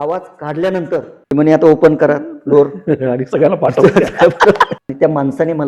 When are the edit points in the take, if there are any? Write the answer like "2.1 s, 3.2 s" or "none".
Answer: 1.1 s, 4.7 s